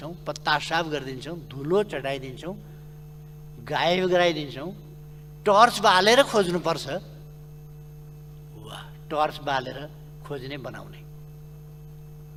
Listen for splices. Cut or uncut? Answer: uncut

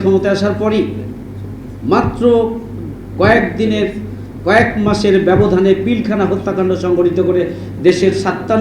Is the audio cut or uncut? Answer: uncut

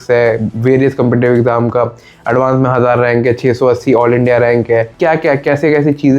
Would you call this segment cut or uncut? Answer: cut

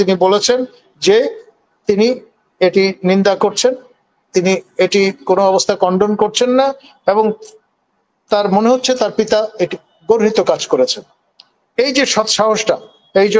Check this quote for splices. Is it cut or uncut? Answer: uncut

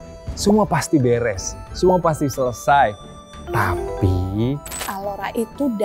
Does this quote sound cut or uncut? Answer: cut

